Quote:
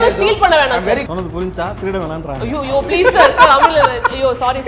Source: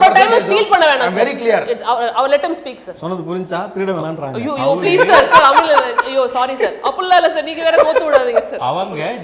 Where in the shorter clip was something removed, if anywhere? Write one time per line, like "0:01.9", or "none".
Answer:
0:01.1